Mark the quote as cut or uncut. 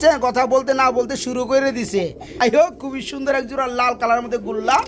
cut